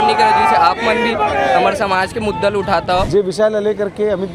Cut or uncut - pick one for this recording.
cut